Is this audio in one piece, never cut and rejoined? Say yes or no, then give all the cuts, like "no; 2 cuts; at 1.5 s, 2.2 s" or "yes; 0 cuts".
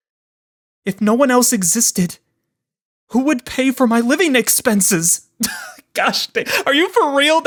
yes; 0 cuts